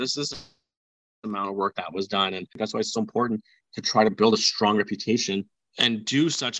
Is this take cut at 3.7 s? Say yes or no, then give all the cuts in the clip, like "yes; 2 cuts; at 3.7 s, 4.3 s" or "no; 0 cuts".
no; 2 cuts; at 2.5 s, 5.6 s